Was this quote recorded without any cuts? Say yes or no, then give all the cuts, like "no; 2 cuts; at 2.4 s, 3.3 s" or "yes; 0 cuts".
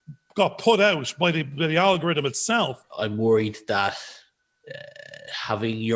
no; 1 cut; at 2.8 s